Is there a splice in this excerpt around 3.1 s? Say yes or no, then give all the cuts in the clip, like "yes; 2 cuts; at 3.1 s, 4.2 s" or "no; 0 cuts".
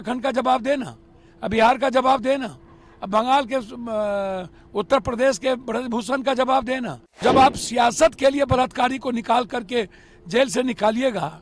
no; 1 cut; at 7.2 s